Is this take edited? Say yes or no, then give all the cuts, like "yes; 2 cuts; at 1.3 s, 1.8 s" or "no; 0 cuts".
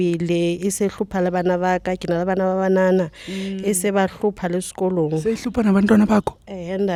no; 0 cuts